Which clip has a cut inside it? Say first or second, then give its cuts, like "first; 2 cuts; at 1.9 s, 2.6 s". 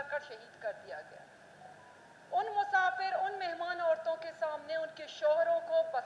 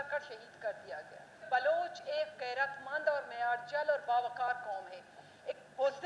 second; 1 cut; at 1.5 s